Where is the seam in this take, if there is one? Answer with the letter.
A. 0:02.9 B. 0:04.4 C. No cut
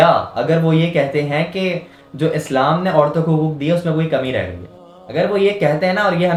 C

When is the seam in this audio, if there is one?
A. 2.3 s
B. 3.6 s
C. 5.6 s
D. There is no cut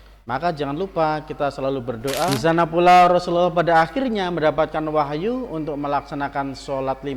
A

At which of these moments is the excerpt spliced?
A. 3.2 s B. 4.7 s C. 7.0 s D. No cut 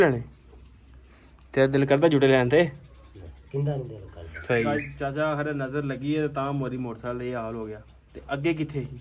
B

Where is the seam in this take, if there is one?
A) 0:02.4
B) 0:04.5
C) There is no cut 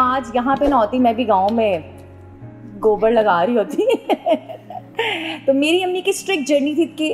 C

